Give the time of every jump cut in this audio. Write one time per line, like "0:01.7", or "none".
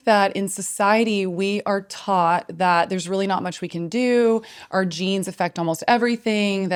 none